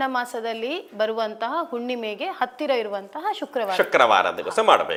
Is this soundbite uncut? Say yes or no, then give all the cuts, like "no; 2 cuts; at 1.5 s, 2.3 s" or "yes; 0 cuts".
yes; 0 cuts